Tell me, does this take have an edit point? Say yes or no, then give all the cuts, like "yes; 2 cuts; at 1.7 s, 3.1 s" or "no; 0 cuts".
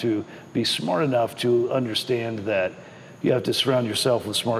no; 0 cuts